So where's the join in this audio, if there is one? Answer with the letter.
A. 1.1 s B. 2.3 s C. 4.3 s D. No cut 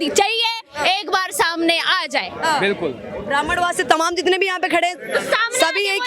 D